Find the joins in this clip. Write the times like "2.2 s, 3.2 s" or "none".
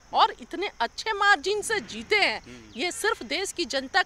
none